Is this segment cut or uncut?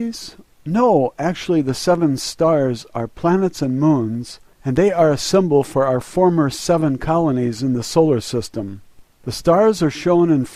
uncut